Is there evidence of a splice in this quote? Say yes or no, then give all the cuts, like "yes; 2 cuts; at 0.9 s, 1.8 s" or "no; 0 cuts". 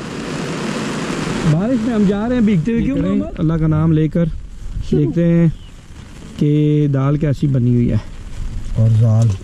yes; 1 cut; at 3.0 s